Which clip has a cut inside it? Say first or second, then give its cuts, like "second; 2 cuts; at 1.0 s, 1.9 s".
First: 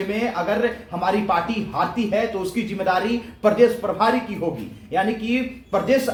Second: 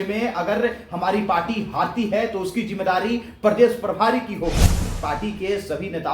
second; 1 cut; at 4.9 s